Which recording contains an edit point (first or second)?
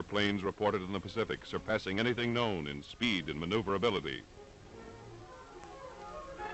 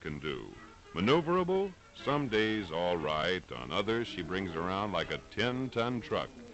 first